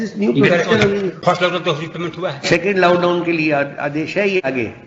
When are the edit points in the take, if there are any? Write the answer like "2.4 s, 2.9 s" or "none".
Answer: 1.2 s